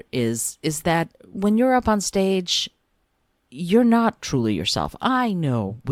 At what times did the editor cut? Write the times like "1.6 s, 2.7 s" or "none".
none